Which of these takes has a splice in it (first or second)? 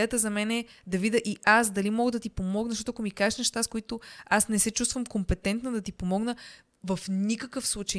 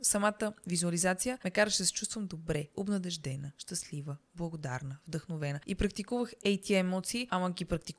second